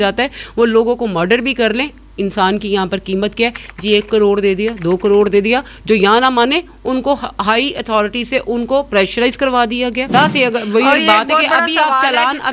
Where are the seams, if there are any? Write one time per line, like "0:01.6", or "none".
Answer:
0:10.1